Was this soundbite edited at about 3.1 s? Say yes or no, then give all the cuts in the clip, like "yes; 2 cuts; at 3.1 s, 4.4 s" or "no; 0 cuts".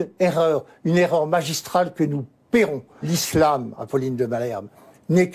yes; 1 cut; at 3.1 s